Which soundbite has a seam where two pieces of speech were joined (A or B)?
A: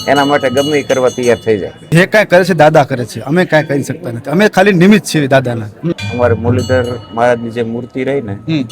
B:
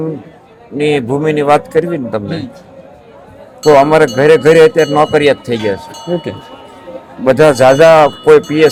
A